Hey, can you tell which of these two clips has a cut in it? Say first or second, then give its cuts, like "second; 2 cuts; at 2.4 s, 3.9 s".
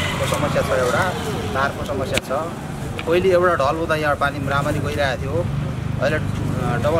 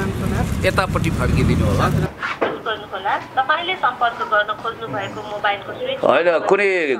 second; 1 cut; at 2.1 s